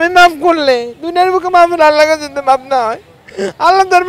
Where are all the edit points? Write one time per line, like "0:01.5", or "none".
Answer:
none